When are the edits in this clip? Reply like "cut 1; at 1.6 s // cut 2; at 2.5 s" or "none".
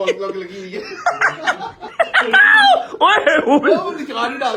cut 1; at 1.8 s